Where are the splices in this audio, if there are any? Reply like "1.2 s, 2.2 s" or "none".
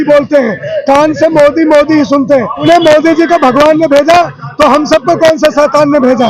2.6 s